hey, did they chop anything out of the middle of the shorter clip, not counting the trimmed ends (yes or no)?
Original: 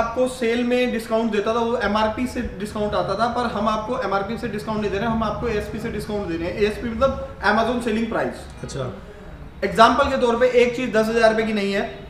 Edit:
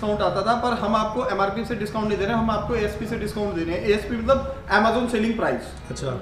no